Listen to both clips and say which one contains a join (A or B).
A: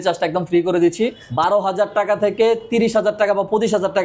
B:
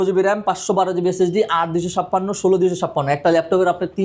A